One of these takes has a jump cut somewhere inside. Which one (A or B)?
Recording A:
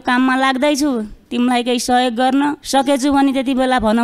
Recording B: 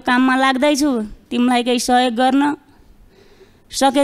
A